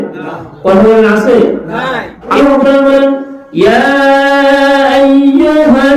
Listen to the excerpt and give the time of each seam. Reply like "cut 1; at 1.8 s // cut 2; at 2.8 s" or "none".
cut 1; at 2.4 s